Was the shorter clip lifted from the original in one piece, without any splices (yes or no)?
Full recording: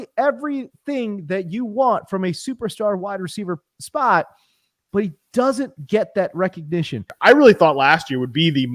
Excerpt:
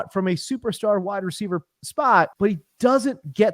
no